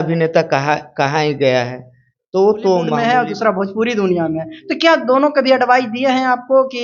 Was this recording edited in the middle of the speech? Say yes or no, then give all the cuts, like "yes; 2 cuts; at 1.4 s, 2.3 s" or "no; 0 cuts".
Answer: yes; 1 cut; at 2.9 s